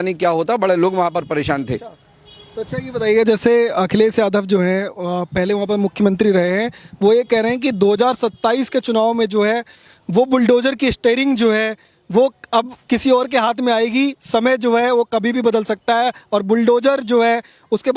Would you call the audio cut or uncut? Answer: uncut